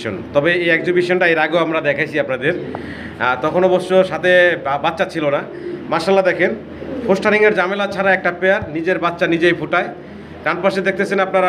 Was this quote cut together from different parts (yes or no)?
no